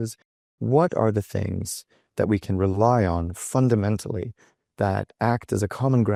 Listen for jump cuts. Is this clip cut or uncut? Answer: uncut